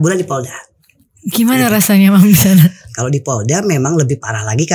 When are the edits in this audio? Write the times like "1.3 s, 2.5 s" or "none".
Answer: 2.8 s